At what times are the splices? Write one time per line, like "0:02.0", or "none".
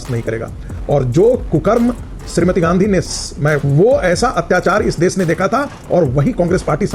0:03.6